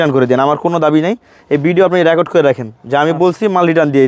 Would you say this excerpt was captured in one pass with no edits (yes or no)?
yes